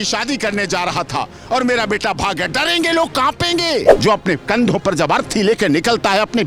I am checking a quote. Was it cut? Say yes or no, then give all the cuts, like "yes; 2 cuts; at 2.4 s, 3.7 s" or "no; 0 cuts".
yes; 1 cut; at 3.9 s